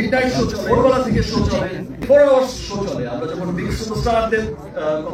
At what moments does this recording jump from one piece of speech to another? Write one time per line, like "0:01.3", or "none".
0:02.0